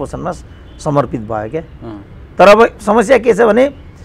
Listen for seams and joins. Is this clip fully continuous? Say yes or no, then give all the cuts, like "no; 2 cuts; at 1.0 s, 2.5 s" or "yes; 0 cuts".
yes; 0 cuts